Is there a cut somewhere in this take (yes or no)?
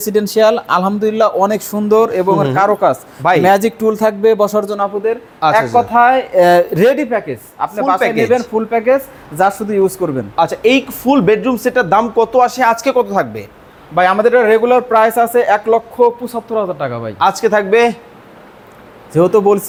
no